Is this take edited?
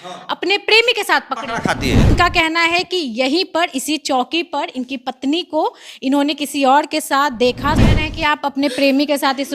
yes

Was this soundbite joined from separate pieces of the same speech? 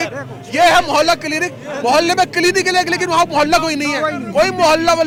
no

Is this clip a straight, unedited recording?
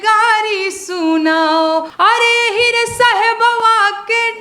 no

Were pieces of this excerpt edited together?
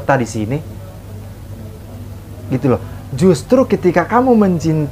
no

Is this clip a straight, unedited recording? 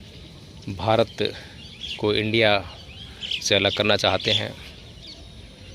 yes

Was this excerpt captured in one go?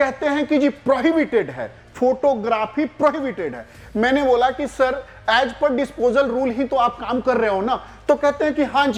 yes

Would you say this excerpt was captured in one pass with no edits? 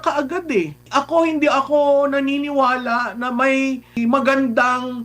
no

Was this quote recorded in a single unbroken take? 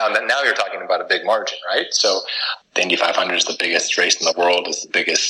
no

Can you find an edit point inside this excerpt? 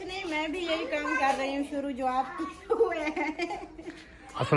no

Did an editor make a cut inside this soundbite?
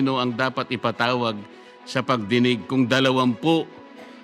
no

